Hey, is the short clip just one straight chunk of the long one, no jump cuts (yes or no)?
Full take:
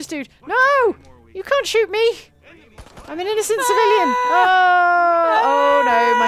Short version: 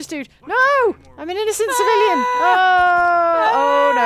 no